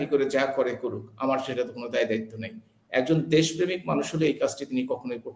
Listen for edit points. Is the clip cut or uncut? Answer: uncut